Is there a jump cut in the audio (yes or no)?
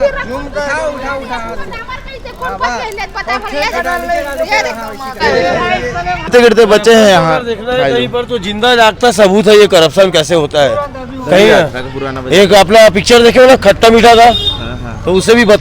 yes